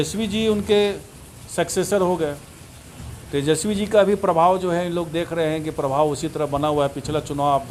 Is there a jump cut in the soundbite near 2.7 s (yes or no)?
no